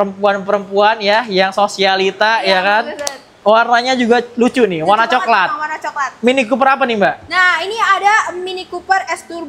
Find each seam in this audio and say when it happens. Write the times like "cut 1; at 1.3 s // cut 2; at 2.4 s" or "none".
none